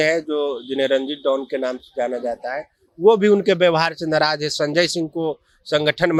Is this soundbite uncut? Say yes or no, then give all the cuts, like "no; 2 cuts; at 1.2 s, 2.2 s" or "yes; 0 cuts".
yes; 0 cuts